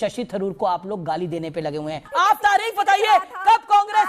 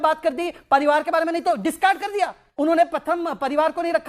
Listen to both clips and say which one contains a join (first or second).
first